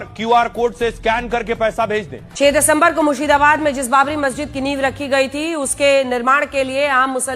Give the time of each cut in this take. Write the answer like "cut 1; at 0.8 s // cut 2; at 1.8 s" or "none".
cut 1; at 2.2 s